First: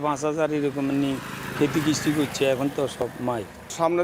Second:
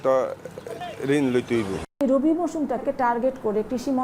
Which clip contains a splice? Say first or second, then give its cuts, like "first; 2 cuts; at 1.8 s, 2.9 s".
second; 2 cuts; at 2.0 s, 2.8 s